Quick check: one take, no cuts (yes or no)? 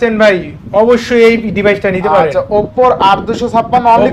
yes